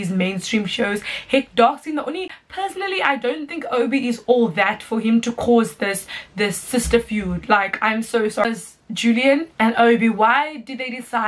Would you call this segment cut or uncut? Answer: cut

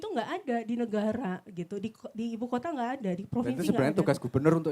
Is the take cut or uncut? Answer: uncut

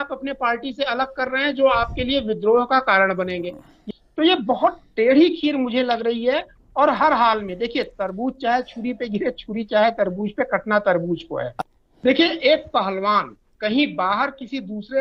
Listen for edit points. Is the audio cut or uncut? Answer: cut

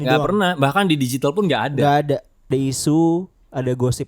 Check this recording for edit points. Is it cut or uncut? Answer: cut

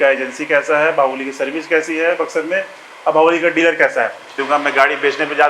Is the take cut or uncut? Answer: cut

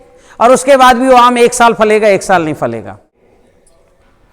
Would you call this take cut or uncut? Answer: cut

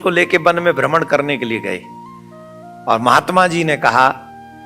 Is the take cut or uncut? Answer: uncut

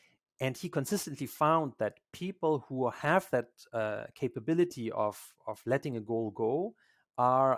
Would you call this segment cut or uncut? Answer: uncut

